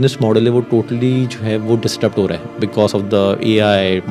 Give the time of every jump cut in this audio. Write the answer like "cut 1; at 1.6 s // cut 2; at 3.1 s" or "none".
none